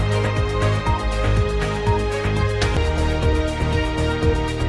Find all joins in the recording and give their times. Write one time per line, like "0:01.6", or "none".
none